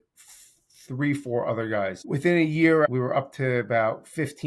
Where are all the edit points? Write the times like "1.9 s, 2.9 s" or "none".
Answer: 2.0 s, 2.9 s